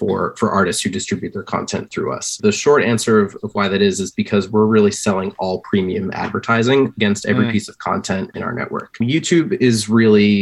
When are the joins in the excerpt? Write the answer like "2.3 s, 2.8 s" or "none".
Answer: 2.4 s, 9.0 s